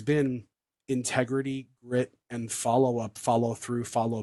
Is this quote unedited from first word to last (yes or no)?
yes